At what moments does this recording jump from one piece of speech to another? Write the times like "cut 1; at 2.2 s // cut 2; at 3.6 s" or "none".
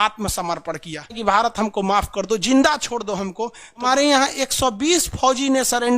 cut 1; at 1.2 s // cut 2; at 3.9 s